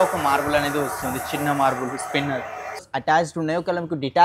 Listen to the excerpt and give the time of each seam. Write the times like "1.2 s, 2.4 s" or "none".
2.8 s